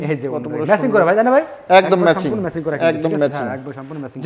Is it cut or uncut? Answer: uncut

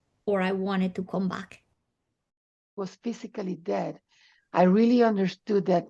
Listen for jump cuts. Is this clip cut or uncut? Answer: cut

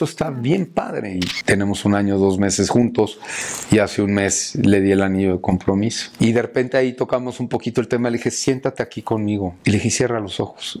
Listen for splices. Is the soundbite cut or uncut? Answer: cut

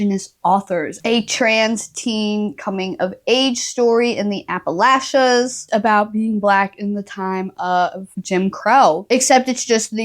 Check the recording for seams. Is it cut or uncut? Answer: cut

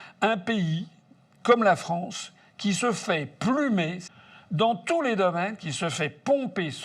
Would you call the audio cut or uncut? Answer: cut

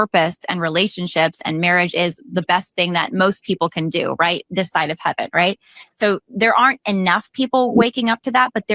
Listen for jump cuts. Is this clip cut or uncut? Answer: uncut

